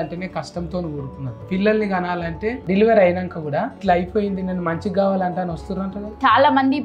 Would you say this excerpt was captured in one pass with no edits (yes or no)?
no